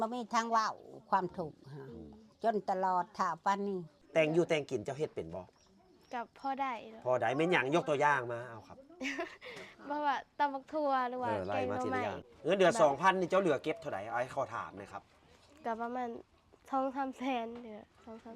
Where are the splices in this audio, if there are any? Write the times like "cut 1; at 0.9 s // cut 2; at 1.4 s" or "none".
cut 1; at 4.0 s // cut 2; at 12.2 s